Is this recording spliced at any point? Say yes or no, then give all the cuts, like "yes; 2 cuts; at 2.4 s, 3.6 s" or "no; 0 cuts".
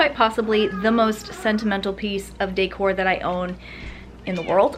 no; 0 cuts